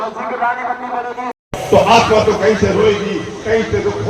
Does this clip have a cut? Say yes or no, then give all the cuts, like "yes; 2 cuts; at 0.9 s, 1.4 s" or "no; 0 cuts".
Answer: yes; 1 cut; at 1.4 s